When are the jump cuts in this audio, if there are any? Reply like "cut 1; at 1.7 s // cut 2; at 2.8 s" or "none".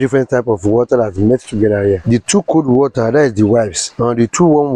cut 1; at 3.9 s